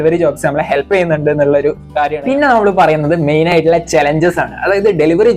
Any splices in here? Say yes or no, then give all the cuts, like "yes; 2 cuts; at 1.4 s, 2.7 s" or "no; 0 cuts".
no; 0 cuts